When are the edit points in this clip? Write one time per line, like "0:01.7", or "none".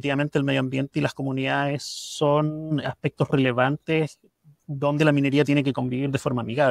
none